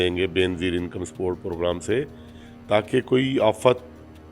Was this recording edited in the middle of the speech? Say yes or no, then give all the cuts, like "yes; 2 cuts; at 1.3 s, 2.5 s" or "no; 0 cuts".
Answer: no; 0 cuts